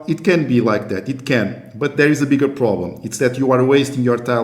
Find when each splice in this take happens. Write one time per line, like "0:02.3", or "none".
none